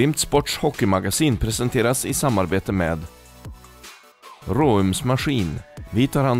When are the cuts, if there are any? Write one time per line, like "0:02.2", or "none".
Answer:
none

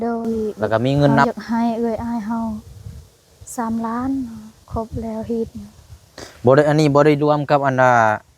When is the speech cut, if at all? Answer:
0:01.2

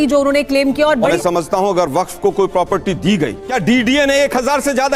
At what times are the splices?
0:01.1
0:03.4

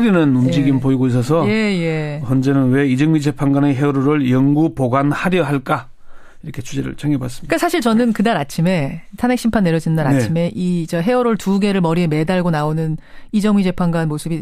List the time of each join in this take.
0:05.7

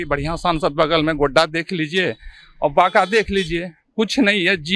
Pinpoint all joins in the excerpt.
none

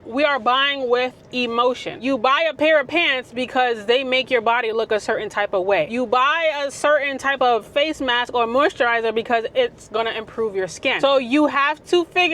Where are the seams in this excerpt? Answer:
0:02.0
0:05.9
0:10.9

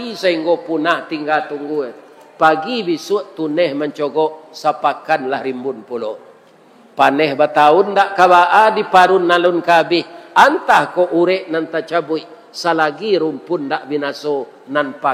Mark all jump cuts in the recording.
none

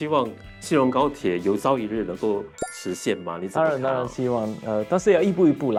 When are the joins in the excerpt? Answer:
none

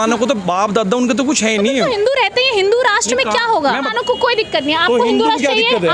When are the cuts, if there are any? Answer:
0:03.8

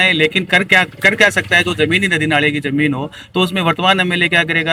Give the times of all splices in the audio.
none

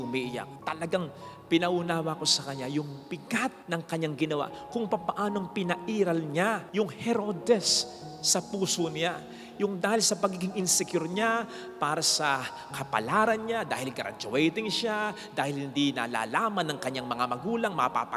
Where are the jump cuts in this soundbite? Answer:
none

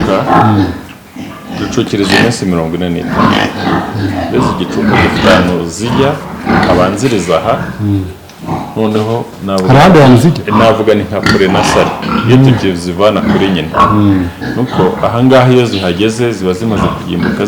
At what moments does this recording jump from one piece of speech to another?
none

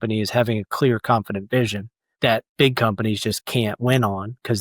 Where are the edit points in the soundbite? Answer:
0:02.0

